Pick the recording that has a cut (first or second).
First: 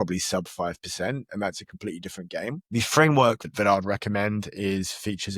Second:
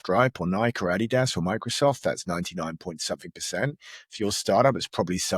first